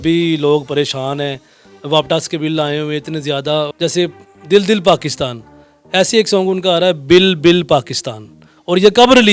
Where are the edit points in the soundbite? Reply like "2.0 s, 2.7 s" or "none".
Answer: 3.7 s